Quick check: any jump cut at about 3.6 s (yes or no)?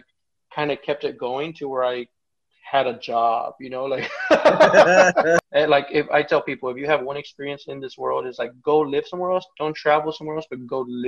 no